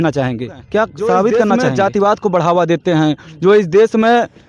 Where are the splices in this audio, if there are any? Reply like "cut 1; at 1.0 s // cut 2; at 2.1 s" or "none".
cut 1; at 1.5 s